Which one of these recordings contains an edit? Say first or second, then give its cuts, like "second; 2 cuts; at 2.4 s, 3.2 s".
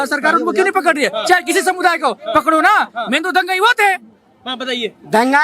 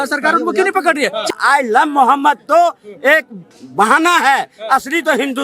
second; 1 cut; at 1.3 s